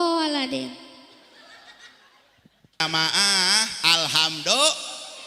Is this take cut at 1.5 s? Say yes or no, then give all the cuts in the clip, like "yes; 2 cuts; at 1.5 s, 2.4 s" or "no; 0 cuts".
no; 1 cut; at 2.8 s